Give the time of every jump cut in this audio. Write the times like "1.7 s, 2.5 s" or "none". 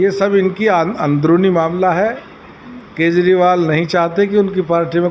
none